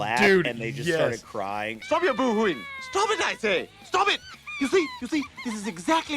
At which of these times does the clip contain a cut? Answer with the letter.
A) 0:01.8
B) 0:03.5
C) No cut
A